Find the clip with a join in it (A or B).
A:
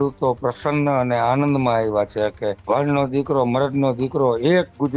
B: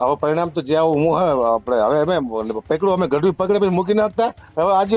A